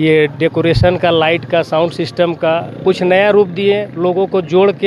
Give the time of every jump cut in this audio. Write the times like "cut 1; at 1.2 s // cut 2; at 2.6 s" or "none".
none